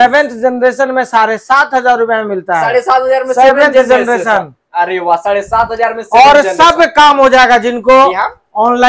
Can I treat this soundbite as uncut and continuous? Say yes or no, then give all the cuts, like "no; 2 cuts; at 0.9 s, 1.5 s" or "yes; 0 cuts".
yes; 0 cuts